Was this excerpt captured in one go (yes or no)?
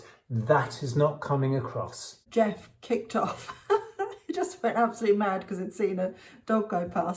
no